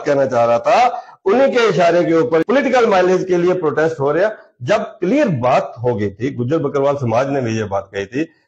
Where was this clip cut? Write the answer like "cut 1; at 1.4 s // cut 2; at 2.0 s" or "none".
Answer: cut 1; at 2.4 s